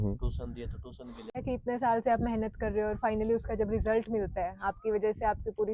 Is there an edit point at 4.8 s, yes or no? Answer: no